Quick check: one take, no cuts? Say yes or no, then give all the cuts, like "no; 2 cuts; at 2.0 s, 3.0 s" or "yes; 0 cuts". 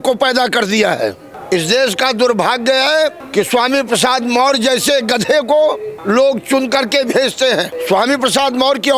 no; 4 cuts; at 1.3 s, 3.2 s, 5.9 s, 7.7 s